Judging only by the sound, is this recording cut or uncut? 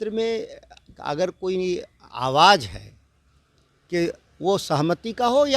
uncut